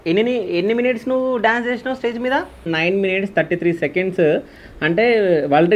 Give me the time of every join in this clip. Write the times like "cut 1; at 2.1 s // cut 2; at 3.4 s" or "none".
cut 1; at 2.6 s